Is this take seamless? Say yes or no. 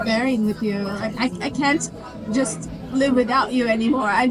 yes